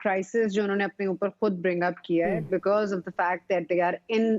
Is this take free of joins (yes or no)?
yes